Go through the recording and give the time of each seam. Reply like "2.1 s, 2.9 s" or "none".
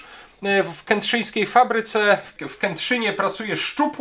2.4 s